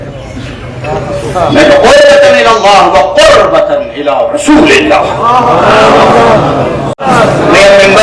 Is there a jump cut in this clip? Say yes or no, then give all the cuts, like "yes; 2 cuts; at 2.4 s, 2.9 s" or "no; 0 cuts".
yes; 1 cut; at 7.0 s